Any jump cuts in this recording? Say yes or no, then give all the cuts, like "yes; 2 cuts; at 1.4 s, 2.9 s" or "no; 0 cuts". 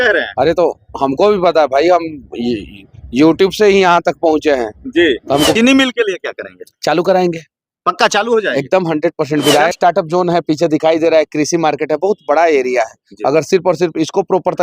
yes; 2 cuts; at 5.5 s, 9.7 s